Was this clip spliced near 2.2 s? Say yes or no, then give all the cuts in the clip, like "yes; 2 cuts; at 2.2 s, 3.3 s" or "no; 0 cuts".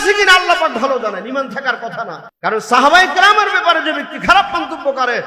yes; 1 cut; at 2.2 s